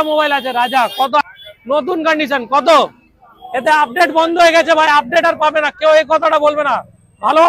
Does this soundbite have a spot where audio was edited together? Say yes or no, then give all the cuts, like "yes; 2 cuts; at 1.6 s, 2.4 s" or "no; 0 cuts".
yes; 1 cut; at 1.2 s